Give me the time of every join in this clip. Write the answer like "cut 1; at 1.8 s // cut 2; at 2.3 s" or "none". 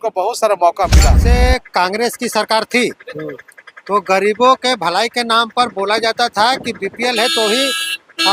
cut 1; at 1.2 s